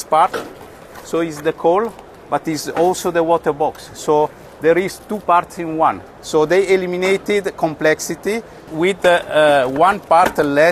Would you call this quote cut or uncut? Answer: uncut